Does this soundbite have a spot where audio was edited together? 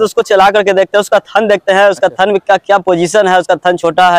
no; 0 cuts

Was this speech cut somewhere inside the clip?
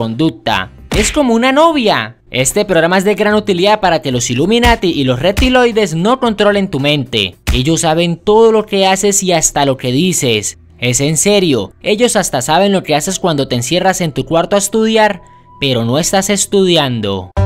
no; 0 cuts

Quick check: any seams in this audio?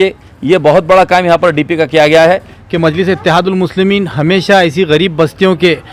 yes; 1 cut; at 2.6 s

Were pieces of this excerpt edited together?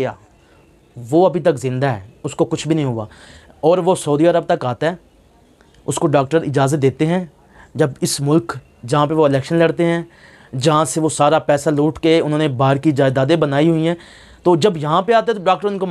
no; 0 cuts

